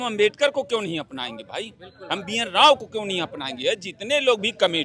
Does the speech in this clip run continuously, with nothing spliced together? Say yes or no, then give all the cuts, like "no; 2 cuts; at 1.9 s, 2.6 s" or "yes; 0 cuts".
yes; 0 cuts